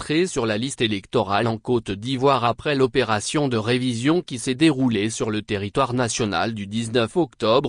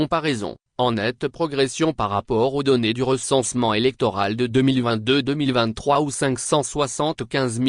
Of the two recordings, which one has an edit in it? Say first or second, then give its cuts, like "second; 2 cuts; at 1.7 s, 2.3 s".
first; 1 cut; at 1.4 s